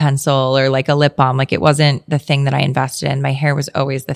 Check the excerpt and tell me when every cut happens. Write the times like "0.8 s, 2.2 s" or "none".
none